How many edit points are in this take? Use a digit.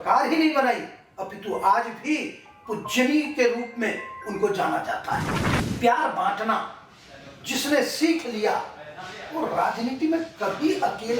1